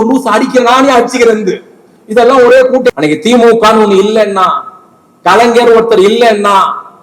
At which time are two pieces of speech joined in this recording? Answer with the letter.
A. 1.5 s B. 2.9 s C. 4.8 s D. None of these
B